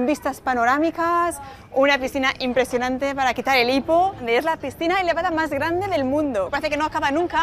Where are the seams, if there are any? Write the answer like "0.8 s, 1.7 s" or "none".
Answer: 6.5 s